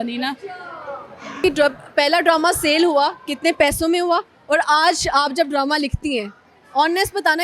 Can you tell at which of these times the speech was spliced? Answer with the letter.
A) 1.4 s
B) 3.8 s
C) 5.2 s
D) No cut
A